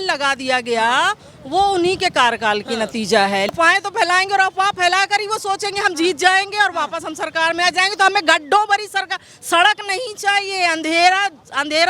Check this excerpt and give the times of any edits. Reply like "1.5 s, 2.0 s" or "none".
3.5 s